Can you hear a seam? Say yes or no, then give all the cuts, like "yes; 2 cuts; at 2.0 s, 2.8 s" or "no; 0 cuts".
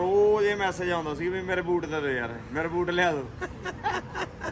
no; 0 cuts